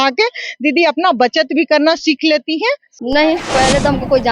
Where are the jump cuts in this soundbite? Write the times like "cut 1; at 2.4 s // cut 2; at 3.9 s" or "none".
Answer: cut 1; at 2.9 s